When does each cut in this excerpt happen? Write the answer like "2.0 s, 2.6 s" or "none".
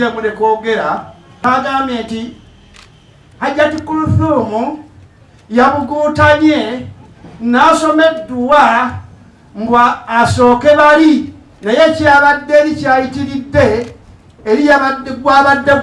1.4 s

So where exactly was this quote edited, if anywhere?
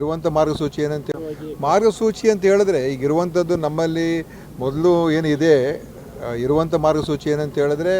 1.0 s

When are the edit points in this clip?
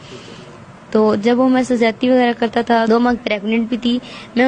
2.9 s

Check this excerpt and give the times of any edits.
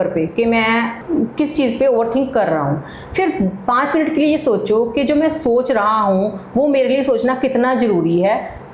1.0 s

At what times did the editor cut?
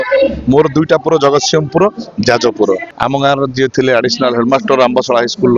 2.9 s

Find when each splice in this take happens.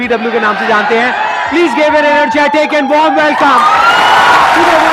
none

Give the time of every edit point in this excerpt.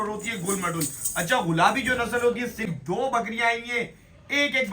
2.7 s

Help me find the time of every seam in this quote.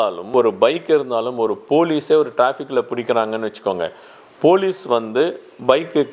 none

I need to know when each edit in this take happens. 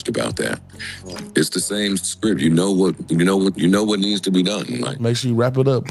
4.9 s

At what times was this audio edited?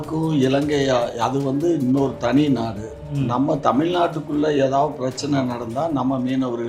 none

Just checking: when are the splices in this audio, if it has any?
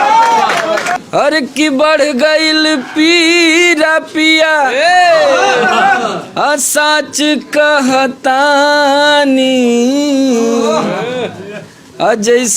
0.9 s

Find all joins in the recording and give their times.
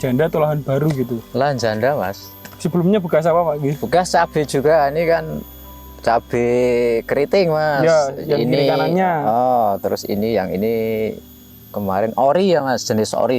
none

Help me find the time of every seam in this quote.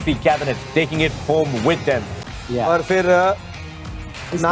2.3 s

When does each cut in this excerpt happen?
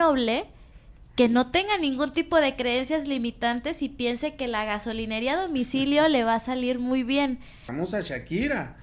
7.6 s

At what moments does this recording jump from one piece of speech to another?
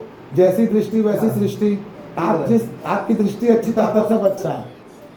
none

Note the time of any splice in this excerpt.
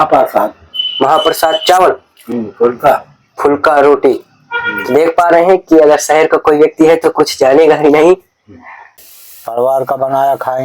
9.0 s

